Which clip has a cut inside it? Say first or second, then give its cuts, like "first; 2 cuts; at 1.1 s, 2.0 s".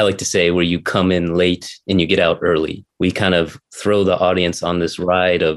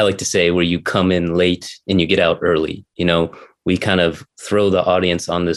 first; 1 cut; at 2.8 s